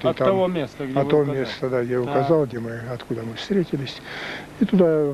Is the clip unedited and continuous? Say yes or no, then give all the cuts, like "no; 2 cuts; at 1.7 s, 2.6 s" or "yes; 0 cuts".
yes; 0 cuts